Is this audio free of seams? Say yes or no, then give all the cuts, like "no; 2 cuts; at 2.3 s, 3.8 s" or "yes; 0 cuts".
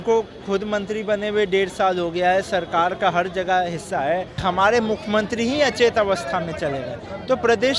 no; 1 cut; at 4.3 s